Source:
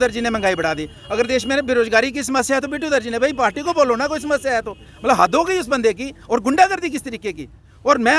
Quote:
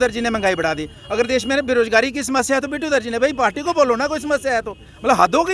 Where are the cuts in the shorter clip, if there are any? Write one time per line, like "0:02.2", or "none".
none